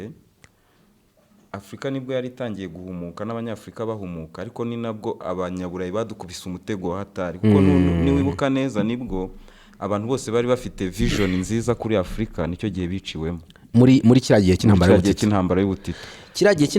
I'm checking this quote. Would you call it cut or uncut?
uncut